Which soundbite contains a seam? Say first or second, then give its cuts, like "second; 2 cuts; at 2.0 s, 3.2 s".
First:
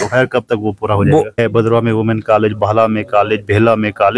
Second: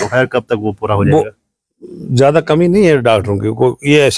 first; 1 cut; at 1.3 s